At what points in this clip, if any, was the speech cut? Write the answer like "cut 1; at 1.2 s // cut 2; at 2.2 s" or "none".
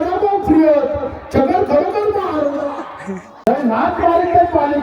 cut 1; at 3.5 s